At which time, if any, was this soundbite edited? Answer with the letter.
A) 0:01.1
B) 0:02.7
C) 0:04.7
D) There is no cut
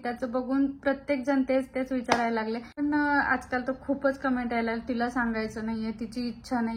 B